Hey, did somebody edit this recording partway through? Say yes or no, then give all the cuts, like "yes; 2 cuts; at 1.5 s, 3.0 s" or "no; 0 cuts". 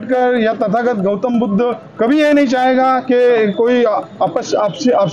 no; 0 cuts